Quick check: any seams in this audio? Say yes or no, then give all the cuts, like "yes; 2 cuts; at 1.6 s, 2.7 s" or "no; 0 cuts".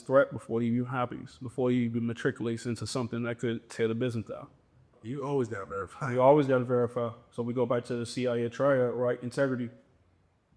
yes; 1 cut; at 4.9 s